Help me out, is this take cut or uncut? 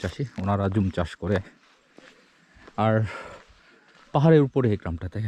uncut